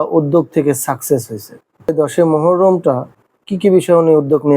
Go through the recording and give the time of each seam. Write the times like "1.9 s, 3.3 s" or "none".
1.9 s

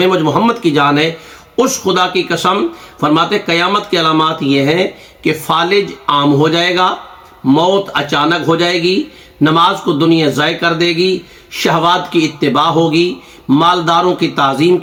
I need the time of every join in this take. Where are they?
none

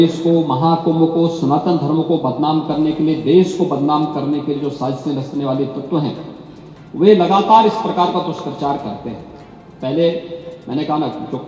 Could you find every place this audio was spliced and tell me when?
none

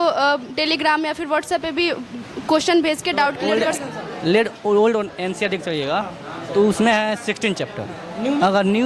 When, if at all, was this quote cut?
3.5 s

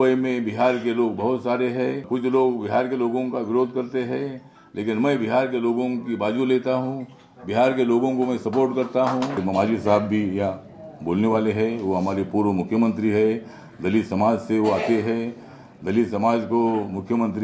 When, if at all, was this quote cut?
2.0 s, 9.4 s

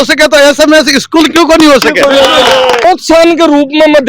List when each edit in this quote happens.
2.8 s

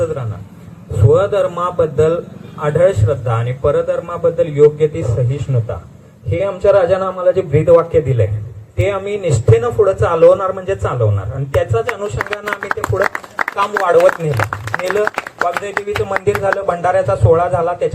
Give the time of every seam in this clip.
none

